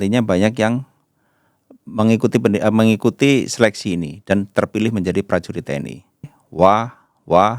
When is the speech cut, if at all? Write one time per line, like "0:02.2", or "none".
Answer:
0:06.4

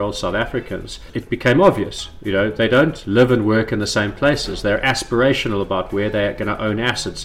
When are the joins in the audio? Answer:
0:01.1

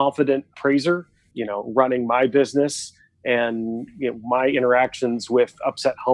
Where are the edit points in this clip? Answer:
none

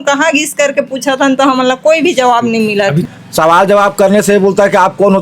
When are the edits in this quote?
0:03.0

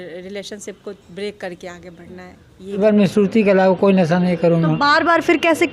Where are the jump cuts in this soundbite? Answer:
0:02.8

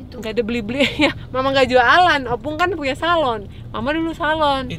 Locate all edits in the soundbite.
none

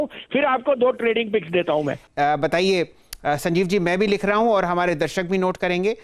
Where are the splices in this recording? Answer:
0:02.0

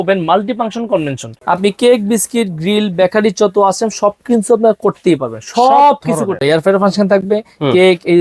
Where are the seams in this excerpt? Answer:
0:01.3
0:06.4

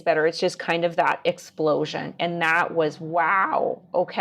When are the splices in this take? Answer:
none

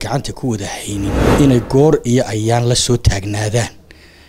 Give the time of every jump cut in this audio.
0:01.2

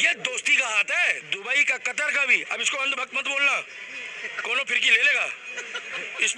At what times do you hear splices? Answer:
0:01.2

